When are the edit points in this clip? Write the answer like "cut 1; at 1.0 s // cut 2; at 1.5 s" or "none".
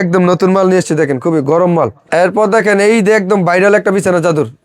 cut 1; at 2.0 s